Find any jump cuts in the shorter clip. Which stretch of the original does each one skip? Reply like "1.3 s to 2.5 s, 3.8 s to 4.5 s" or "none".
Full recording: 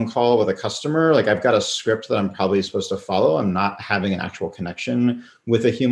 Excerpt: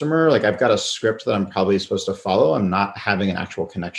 none